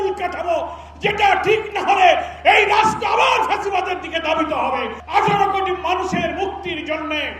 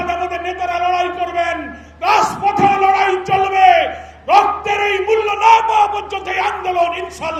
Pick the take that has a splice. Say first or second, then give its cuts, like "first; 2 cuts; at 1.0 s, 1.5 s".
first; 1 cut; at 5.0 s